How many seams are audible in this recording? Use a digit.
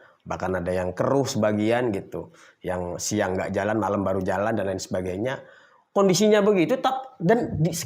0